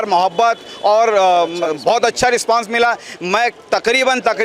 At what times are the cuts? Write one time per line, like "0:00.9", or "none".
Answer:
none